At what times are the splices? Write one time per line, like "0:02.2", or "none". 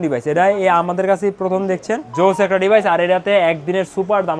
0:02.1